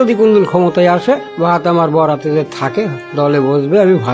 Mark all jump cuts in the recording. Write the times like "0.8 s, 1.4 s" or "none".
1.3 s, 3.0 s